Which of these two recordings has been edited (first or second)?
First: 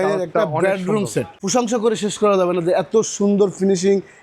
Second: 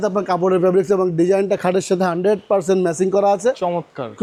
first